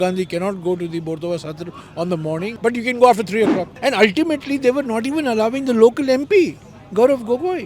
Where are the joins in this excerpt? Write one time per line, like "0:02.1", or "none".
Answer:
0:02.5
0:03.7